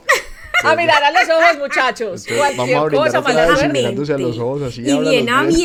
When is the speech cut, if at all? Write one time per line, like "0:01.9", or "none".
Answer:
none